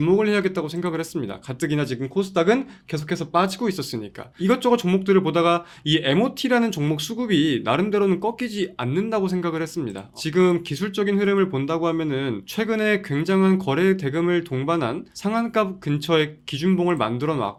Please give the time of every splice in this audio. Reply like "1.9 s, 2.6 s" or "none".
none